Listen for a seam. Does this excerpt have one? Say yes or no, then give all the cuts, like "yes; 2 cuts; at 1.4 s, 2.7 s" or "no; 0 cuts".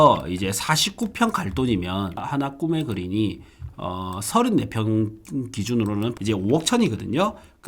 yes; 2 cuts; at 2.2 s, 6.1 s